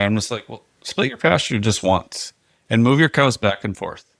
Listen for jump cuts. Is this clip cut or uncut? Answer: uncut